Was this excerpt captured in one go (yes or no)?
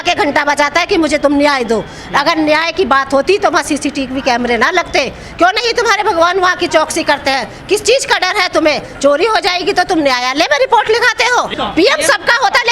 no